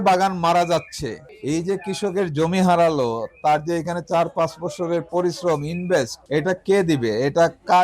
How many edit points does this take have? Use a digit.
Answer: 2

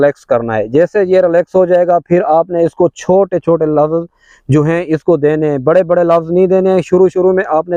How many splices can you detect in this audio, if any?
0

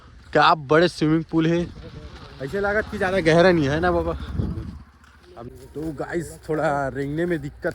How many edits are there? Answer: 1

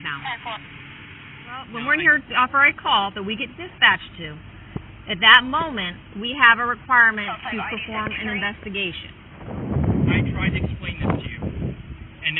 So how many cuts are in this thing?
2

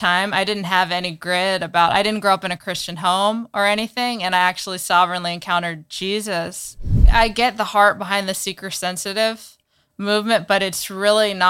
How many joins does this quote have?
1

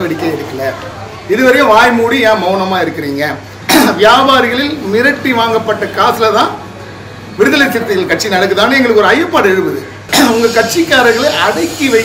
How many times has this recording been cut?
2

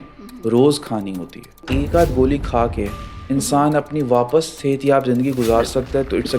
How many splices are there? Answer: 1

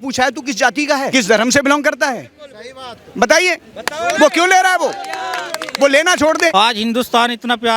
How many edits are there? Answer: 2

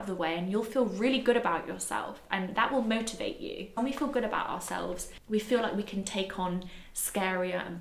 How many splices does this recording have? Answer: 2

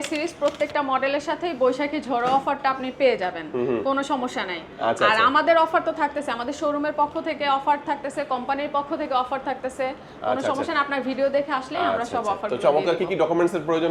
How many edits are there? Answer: 0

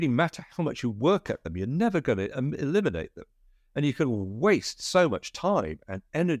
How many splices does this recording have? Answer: 0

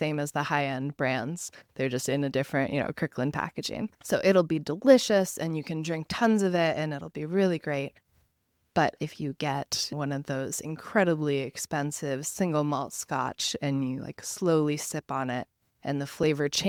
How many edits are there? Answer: 0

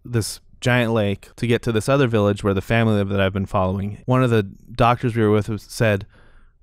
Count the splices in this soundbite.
2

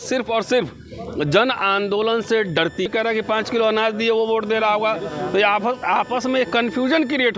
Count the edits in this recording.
1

